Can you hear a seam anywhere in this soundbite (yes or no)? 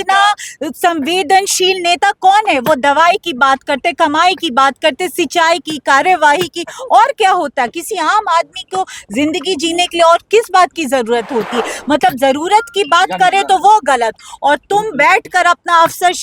no